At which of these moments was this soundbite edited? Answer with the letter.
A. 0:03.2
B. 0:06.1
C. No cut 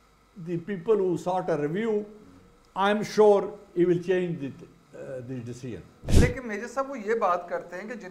B